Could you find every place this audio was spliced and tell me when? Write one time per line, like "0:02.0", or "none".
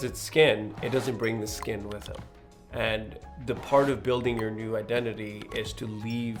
none